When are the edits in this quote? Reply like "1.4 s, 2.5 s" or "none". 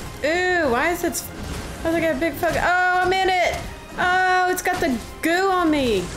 none